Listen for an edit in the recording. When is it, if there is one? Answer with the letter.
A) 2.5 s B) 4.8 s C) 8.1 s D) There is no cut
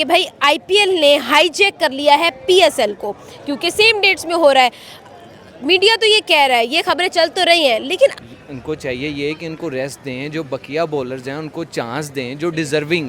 C